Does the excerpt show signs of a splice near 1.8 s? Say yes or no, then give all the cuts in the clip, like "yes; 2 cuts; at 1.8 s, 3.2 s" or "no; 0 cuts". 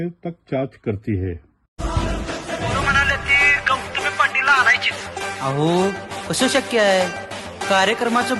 no; 0 cuts